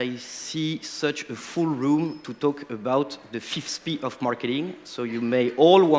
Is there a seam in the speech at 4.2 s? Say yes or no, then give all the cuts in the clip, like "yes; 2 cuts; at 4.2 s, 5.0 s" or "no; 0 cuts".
yes; 1 cut; at 4.2 s